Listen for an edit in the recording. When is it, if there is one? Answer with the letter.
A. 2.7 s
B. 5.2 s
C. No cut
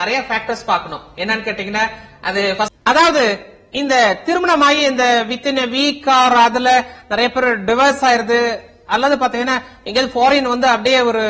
A